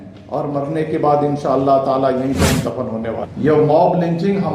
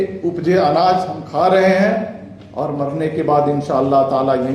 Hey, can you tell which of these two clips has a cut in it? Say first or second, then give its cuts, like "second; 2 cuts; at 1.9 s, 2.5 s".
first; 1 cut; at 3.3 s